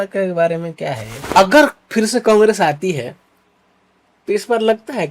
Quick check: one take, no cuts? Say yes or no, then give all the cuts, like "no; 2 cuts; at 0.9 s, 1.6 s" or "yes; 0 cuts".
no; 1 cut; at 1.1 s